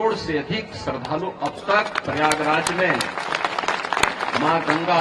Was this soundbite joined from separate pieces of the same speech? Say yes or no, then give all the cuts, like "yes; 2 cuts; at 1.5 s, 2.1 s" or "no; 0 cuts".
no; 0 cuts